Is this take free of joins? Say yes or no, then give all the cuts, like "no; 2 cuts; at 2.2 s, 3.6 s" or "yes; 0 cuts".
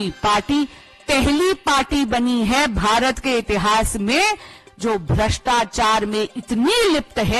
yes; 0 cuts